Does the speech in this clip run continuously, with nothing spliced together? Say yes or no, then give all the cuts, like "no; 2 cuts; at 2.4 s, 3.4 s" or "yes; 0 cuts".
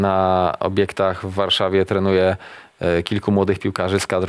yes; 0 cuts